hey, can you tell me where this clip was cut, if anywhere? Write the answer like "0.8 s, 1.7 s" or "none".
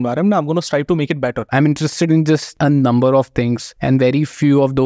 1.4 s, 2.5 s, 3.7 s

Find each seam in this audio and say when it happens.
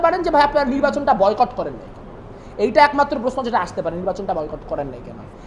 none

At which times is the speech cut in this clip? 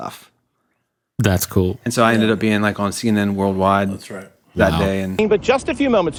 none

